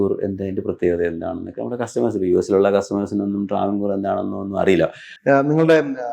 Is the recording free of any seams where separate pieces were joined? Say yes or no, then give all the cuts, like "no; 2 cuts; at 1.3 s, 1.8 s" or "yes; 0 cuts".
no; 1 cut; at 5.1 s